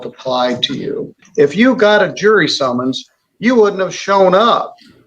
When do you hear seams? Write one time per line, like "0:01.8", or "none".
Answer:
0:01.2